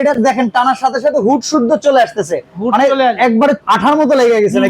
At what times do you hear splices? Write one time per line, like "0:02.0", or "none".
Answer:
0:03.6